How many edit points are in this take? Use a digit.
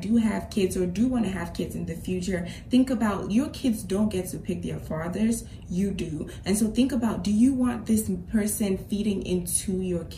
0